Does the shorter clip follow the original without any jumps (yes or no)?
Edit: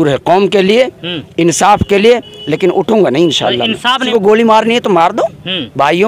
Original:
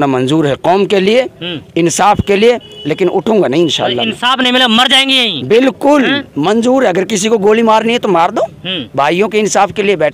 no